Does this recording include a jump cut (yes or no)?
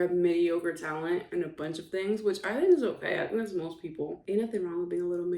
yes